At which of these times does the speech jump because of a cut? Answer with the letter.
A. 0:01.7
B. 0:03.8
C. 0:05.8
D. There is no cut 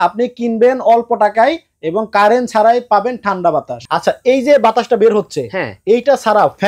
B